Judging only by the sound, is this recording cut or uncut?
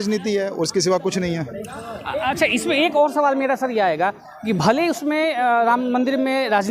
uncut